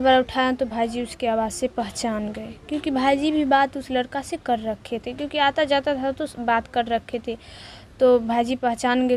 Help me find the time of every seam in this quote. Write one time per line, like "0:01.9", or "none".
none